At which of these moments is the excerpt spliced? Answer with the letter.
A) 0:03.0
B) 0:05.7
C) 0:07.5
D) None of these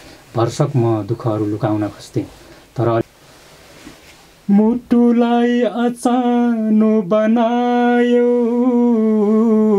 A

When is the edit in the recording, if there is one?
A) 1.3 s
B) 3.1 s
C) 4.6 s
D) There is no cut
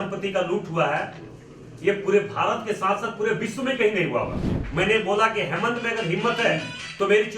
C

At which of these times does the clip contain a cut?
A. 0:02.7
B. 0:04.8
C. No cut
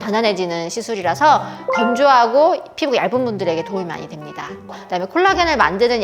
B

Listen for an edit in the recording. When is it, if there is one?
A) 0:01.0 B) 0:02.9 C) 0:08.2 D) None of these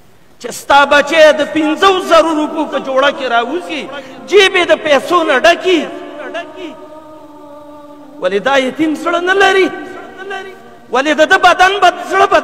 D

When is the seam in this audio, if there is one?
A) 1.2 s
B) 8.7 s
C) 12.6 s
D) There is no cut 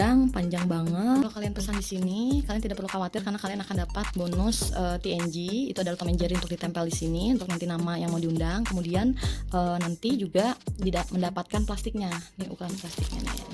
A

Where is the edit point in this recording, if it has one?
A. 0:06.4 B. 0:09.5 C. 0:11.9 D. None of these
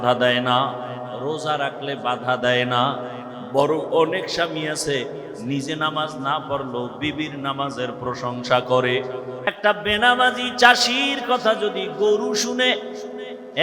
B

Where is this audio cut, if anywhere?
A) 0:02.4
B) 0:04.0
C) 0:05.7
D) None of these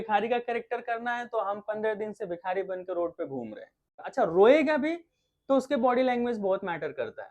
B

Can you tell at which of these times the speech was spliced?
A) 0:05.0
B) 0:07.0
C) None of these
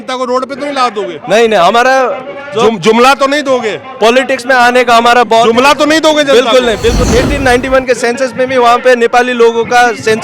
B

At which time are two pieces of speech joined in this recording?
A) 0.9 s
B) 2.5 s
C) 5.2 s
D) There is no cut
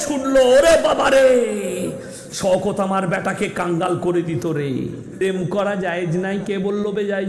C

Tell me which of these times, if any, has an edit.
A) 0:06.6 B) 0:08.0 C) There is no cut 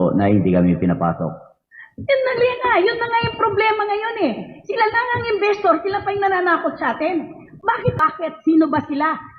B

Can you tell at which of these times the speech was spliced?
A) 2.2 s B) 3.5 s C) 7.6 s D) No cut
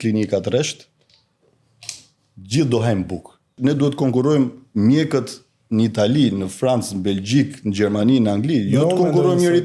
B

